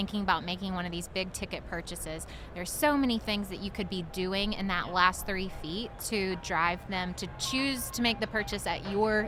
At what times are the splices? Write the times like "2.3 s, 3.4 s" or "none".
none